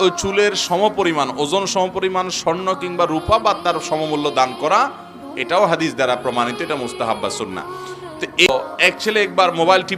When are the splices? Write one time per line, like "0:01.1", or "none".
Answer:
0:08.5